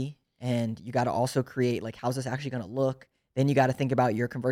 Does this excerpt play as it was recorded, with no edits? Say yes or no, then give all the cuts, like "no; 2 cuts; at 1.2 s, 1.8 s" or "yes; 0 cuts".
yes; 0 cuts